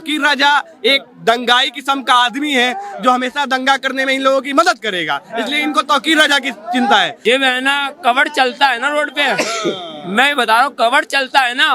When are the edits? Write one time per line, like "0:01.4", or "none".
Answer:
0:07.1